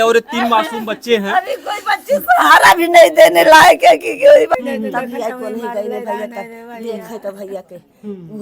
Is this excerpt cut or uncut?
cut